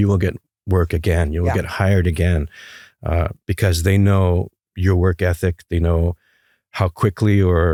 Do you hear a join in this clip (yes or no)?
no